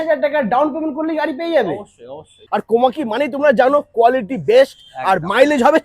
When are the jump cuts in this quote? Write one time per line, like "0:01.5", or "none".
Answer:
0:02.4